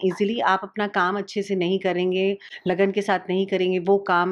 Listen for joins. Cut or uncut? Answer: uncut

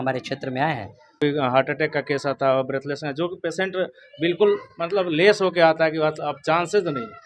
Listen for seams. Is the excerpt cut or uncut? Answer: cut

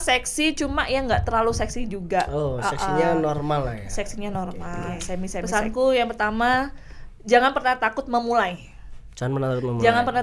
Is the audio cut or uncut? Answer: cut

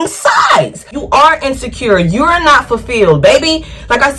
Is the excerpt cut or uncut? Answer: cut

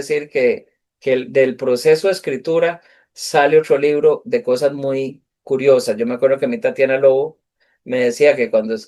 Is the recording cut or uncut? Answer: uncut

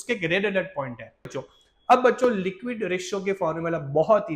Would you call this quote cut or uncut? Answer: cut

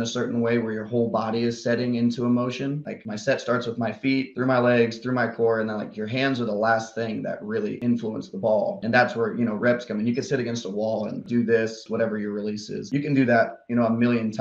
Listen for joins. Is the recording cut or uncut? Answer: cut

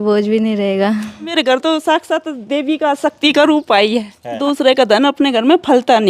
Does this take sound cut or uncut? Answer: cut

